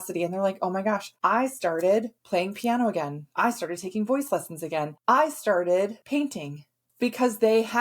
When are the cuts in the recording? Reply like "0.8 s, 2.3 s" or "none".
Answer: 1.1 s, 2.2 s, 3.2 s, 4.9 s, 6.4 s